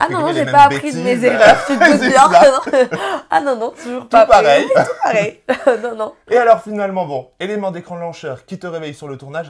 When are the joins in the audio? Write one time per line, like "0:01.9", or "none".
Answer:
none